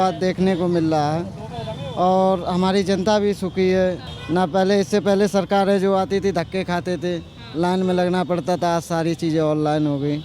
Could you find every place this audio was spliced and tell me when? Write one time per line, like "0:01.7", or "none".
0:04.1